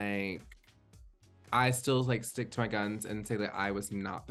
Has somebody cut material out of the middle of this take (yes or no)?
no